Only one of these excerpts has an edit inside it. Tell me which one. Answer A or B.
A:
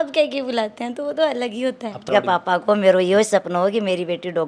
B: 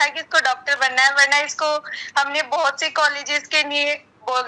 A